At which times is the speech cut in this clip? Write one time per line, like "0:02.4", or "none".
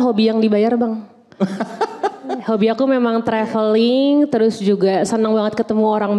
none